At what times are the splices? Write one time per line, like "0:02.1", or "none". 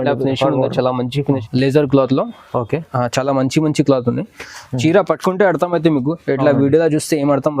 0:01.4